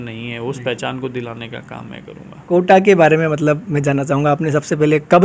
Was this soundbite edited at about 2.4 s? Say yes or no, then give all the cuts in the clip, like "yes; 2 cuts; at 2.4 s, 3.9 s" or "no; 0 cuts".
yes; 1 cut; at 2.4 s